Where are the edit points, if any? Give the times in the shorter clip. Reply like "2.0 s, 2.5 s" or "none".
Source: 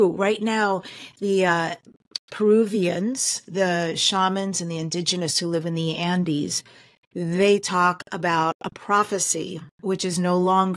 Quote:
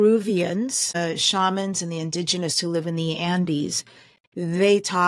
1.0 s